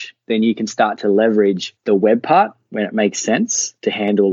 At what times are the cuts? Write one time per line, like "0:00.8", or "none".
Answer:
none